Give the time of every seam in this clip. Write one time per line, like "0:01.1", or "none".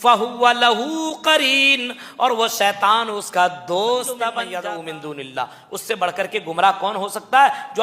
0:04.5